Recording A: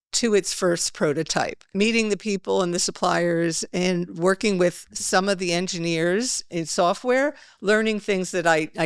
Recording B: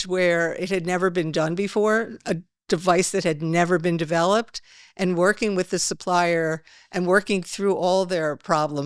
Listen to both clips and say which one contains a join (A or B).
A